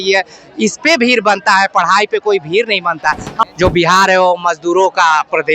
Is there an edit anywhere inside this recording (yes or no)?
yes